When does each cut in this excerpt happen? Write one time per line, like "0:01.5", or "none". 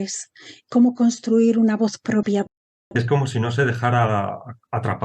0:02.5